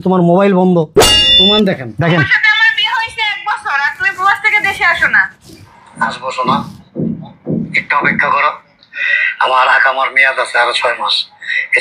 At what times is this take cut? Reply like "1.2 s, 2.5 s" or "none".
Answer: 1.4 s